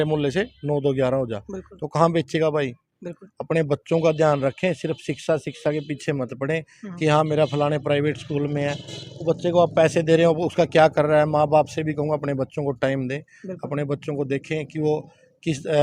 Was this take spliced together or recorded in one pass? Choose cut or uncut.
uncut